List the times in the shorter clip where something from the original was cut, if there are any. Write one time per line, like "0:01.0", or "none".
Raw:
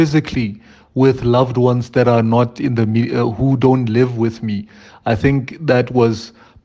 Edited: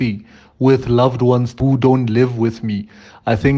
0:01.5